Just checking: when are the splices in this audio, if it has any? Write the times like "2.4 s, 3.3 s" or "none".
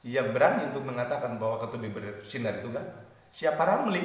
none

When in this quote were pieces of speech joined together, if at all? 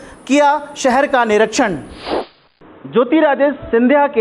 2.4 s

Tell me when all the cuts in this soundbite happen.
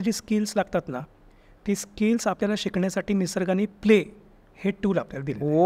none

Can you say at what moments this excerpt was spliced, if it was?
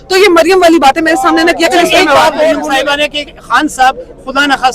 2.6 s

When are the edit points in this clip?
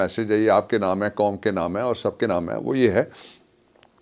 none

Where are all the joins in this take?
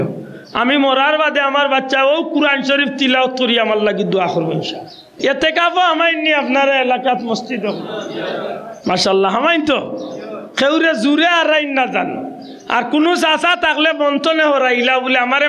5.2 s

